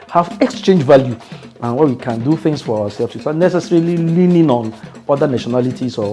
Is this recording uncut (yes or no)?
yes